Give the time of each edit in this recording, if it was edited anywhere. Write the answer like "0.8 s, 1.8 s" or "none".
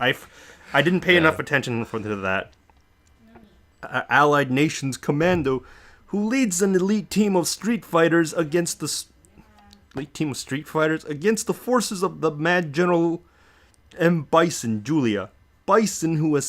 14.6 s